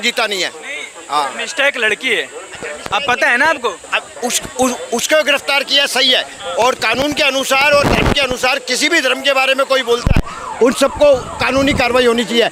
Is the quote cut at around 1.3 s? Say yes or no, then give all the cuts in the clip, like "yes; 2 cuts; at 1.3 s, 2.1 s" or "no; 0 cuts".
no; 0 cuts